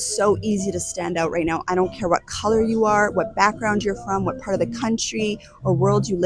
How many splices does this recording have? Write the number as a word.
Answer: zero